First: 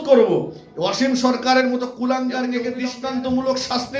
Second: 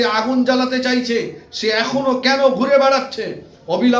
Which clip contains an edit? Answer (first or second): first